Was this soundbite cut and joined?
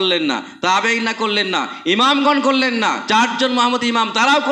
no; 0 cuts

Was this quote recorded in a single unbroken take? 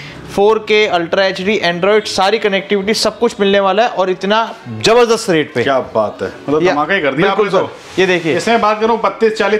yes; 0 cuts

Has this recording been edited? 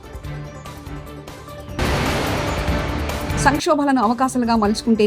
yes; 2 cuts; at 1.8 s, 3.3 s

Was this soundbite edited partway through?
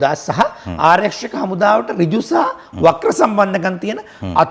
no; 0 cuts

